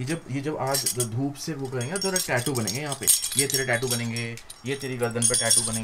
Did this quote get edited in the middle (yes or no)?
no